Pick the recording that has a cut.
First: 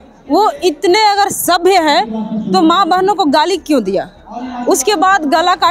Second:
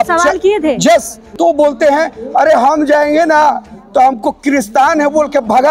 second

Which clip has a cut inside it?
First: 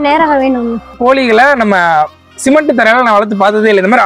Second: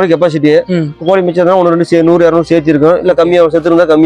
first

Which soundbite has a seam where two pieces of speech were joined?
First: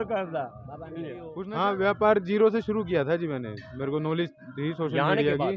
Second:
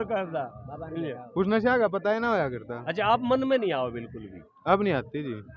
first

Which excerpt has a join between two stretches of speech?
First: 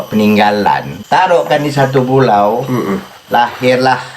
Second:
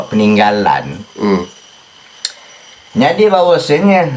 first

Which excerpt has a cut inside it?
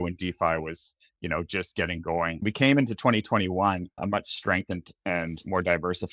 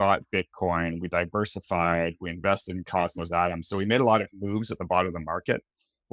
first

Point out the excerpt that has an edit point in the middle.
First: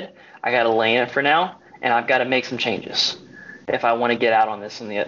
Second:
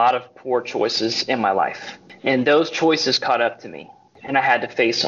second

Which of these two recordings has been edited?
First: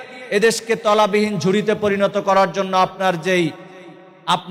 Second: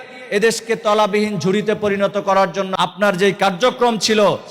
second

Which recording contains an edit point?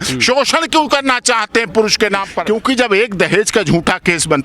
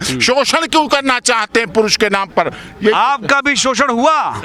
first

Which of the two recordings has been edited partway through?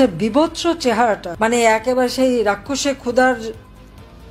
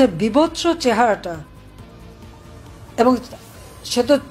first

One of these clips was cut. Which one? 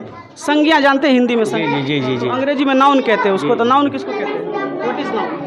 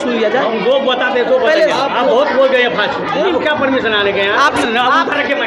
second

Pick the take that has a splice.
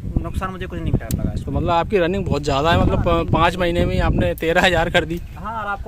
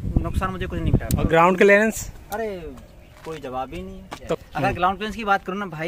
second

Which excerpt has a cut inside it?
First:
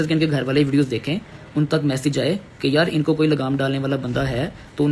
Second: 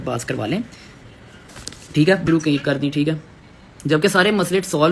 second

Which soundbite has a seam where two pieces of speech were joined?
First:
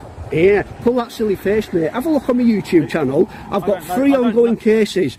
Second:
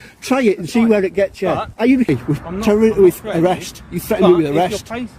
second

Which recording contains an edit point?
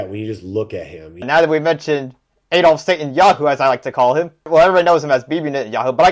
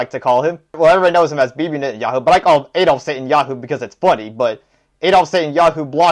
first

